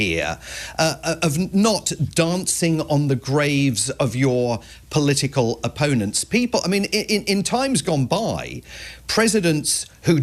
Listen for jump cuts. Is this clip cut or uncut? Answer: uncut